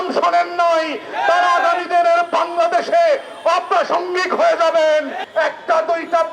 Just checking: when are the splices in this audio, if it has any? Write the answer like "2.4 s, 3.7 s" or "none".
5.2 s